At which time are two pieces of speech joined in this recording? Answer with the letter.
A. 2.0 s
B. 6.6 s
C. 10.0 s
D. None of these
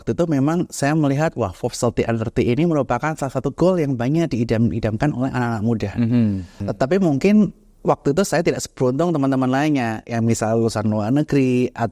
B